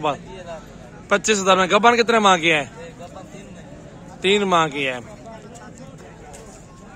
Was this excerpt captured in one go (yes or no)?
yes